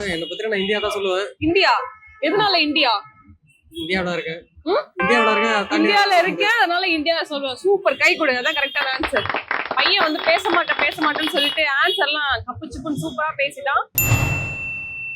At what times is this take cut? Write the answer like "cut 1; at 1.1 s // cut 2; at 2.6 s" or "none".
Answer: cut 1; at 14.0 s

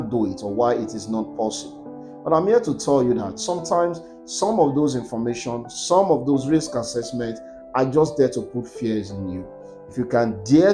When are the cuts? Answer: none

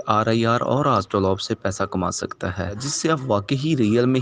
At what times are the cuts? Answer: cut 1; at 2.9 s

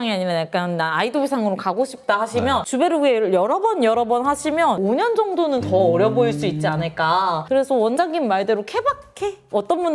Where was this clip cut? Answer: none

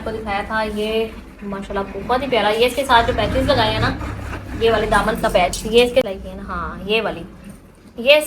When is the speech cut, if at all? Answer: cut 1; at 6.1 s

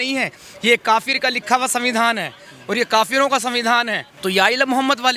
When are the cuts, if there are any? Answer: cut 1; at 4.0 s

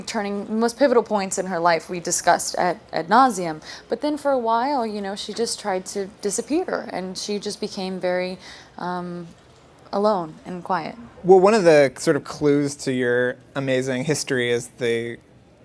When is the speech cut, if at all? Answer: none

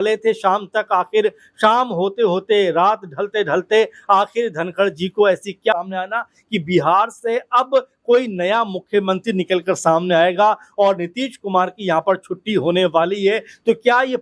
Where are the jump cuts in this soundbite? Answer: cut 1; at 5.7 s

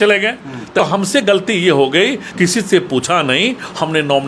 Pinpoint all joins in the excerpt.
cut 1; at 0.8 s // cut 2; at 2.2 s

